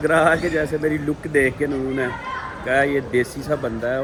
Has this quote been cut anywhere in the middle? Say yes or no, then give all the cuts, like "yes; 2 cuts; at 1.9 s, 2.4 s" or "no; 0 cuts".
no; 0 cuts